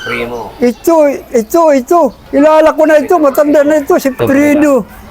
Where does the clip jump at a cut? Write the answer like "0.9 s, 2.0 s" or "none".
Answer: none